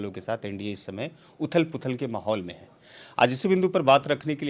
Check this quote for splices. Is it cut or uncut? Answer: uncut